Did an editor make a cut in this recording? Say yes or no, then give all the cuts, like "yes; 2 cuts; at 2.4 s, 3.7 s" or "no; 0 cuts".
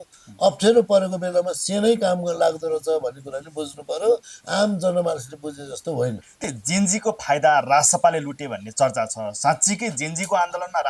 yes; 1 cut; at 6.4 s